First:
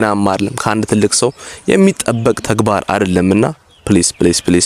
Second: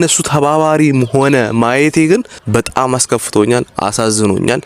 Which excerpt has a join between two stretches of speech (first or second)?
second